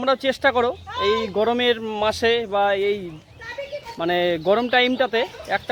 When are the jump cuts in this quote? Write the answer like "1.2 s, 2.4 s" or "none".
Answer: none